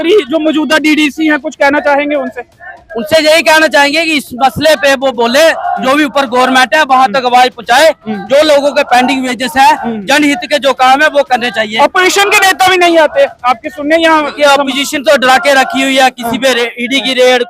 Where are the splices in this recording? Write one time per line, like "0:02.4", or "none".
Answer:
none